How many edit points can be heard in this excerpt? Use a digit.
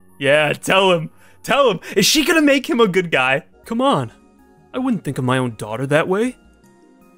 1